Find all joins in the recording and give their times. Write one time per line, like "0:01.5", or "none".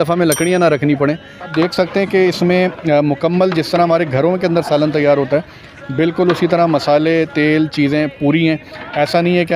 0:01.5